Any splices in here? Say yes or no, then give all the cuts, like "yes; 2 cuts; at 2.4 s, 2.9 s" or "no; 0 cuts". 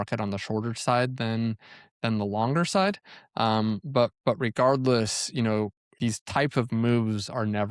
yes; 1 cut; at 5.8 s